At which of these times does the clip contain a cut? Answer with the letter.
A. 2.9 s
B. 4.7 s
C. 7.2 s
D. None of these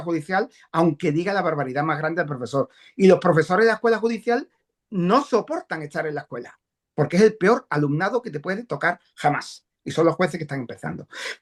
D